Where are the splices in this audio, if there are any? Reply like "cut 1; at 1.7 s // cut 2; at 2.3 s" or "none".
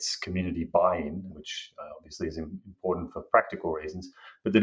cut 1; at 1.3 s